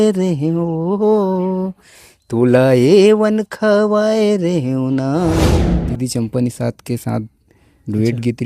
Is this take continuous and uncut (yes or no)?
no